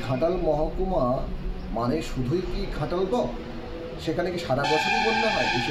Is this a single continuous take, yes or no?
yes